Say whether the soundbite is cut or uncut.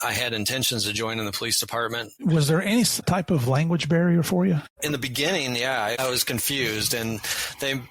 cut